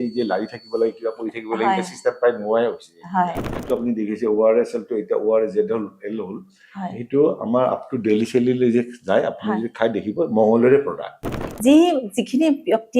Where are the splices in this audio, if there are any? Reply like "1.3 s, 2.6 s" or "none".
3.5 s, 11.4 s